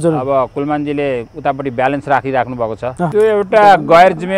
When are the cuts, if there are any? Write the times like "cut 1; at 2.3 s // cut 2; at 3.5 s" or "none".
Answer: cut 1; at 3.1 s